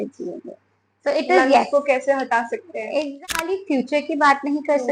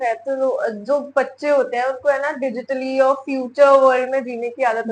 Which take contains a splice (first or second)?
first